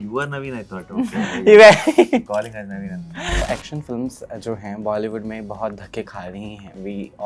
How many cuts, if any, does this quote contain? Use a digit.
1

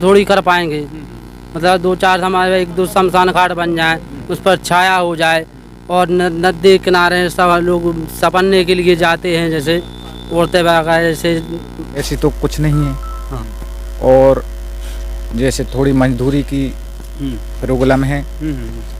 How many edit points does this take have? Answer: 1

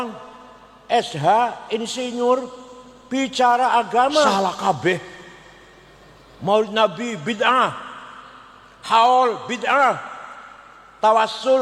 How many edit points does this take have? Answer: 1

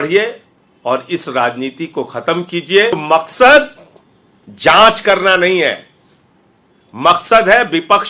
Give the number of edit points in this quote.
1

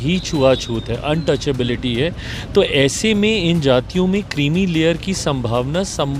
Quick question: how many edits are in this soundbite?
0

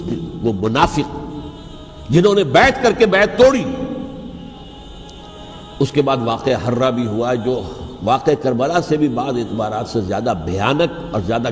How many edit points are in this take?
1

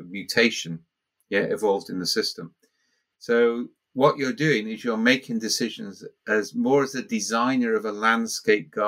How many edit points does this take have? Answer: 0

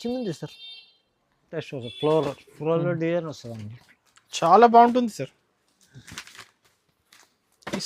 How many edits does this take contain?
1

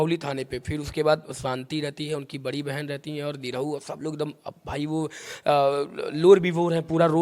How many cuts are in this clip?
0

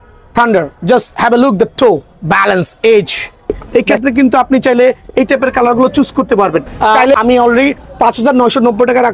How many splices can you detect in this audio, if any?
2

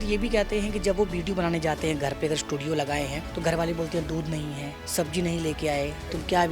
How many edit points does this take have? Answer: 2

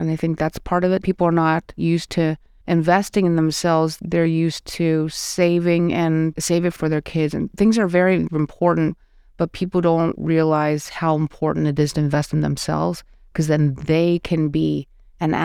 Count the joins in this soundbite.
2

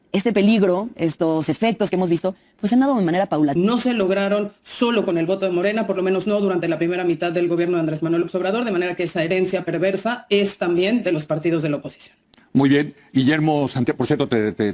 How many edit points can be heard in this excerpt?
1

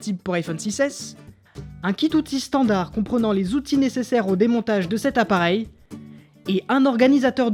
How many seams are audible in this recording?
0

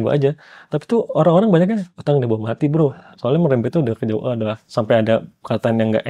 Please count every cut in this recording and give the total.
3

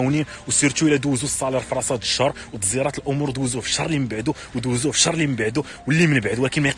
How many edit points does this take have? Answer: 0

